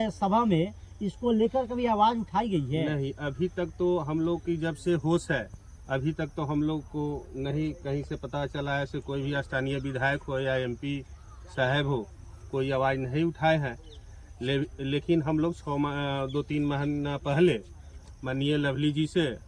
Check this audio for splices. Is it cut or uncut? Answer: uncut